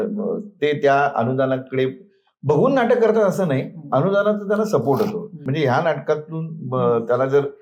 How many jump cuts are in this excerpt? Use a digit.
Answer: 1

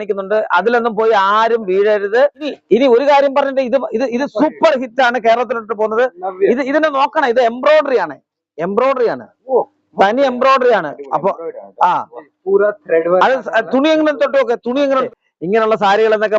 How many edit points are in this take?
2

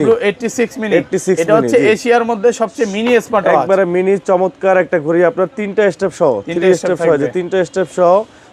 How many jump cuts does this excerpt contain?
0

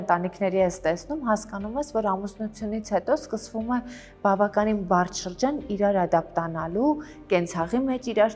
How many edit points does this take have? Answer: 0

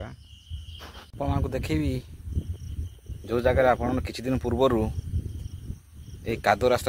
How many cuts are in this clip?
1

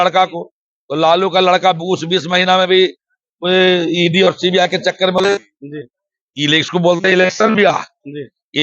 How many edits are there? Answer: 1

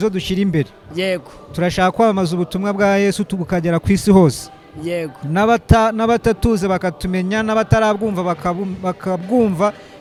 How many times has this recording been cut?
0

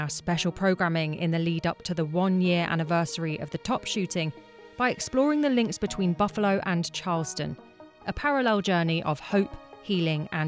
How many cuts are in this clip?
0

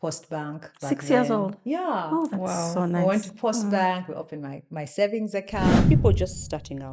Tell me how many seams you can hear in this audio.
1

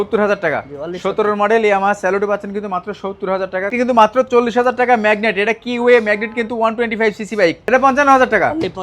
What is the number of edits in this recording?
2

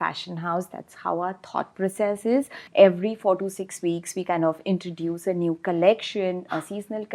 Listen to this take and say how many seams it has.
1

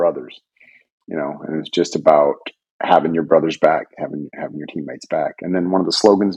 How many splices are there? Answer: 0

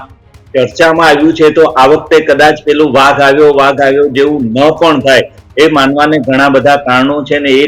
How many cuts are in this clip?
0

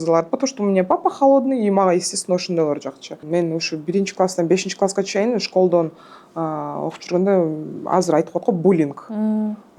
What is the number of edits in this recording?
1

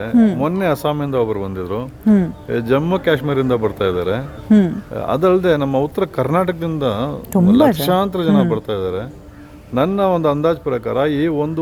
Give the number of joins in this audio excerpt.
0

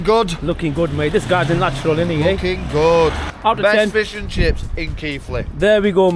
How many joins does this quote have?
1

